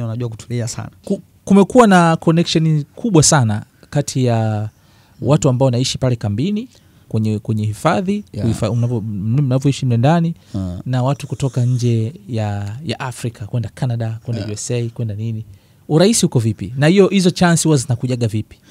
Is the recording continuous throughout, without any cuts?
no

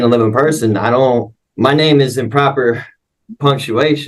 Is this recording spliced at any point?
yes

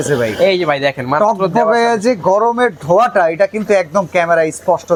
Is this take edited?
no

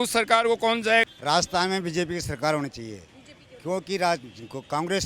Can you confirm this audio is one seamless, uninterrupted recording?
no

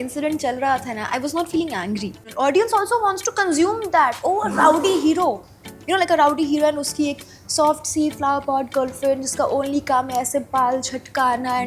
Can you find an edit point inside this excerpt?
yes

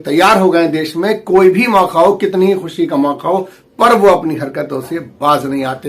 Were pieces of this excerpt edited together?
yes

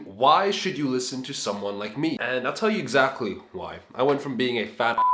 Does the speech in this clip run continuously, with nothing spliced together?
yes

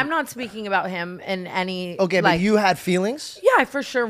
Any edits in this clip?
no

